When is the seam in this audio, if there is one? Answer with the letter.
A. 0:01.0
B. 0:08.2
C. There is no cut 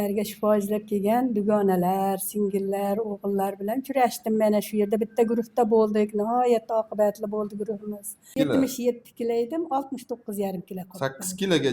B